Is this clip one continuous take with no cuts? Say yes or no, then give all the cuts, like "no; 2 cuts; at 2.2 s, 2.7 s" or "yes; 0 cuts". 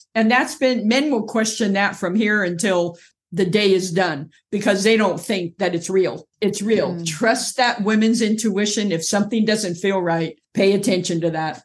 no; 1 cut; at 6.3 s